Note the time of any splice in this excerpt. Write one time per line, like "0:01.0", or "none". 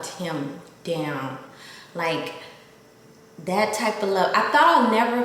none